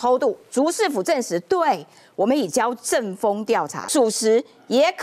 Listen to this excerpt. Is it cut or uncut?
cut